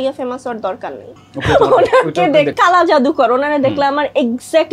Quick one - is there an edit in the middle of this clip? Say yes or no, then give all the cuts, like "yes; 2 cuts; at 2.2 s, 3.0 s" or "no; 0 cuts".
yes; 2 cuts; at 1.1 s, 2.5 s